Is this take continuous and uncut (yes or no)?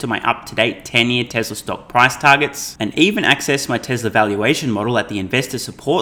yes